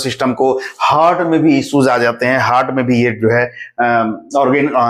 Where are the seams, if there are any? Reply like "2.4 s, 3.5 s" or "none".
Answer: none